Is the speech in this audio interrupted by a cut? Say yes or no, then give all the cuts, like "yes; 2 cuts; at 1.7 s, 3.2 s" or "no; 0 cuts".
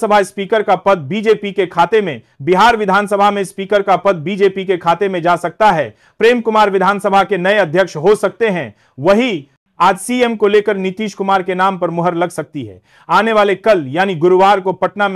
no; 0 cuts